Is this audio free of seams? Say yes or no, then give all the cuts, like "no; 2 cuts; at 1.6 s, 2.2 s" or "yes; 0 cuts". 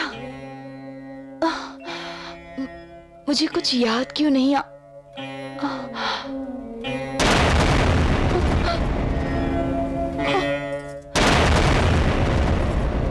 yes; 0 cuts